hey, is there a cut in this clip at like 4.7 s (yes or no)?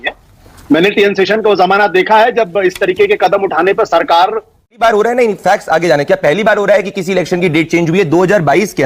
yes